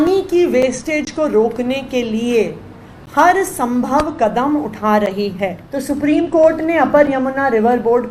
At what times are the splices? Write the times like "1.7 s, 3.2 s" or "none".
5.7 s